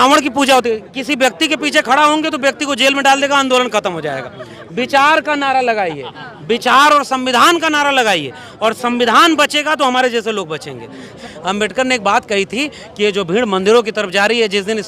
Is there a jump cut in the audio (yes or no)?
yes